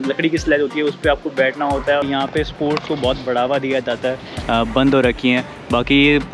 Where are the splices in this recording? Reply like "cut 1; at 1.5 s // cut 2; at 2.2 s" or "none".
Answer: cut 1; at 2.0 s // cut 2; at 4.3 s